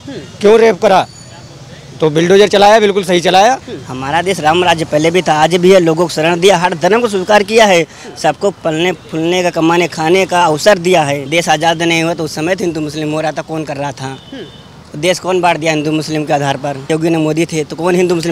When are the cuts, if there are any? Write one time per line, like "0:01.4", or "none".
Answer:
0:03.8
0:11.2
0:16.9